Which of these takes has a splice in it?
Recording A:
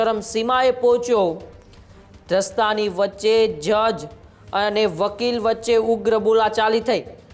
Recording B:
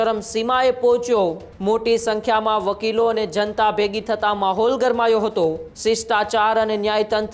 B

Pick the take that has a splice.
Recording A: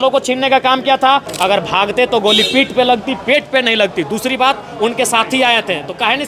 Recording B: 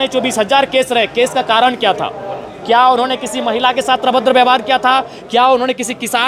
A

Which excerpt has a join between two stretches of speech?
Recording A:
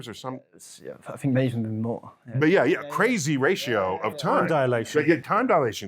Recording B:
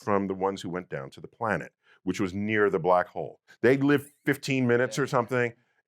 B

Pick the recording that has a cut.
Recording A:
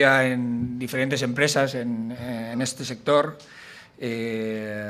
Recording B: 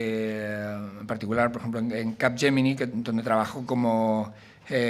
B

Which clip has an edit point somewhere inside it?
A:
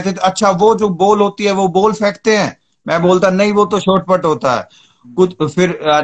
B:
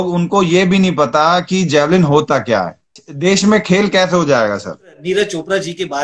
B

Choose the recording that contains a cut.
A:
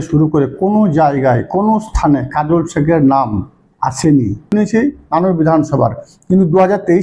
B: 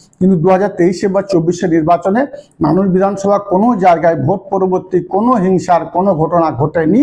A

